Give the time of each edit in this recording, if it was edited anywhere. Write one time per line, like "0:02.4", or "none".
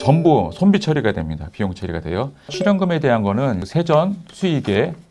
0:02.6
0:03.6